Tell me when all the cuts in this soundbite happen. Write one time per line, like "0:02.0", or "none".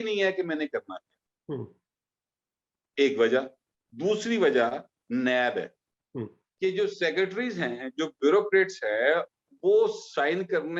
none

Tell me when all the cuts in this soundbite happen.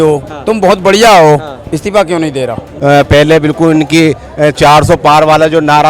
0:02.7

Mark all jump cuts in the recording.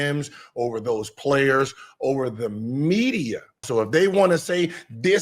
0:03.6

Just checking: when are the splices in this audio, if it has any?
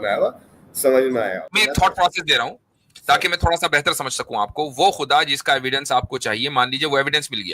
0:01.4

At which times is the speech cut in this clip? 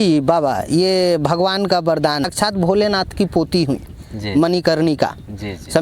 0:02.3

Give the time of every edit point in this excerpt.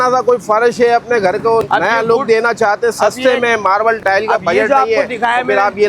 0:01.7
0:04.0

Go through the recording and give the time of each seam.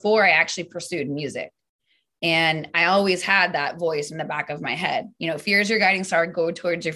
none

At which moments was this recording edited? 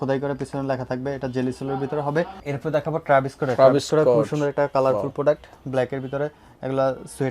0:02.4

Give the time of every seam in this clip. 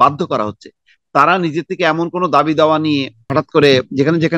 0:03.2

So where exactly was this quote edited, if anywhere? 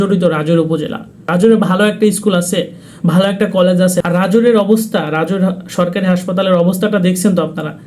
0:01.2
0:04.0

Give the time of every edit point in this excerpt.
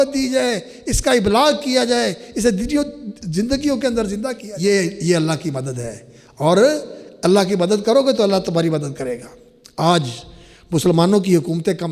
0:04.5

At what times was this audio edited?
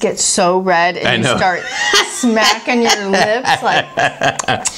none

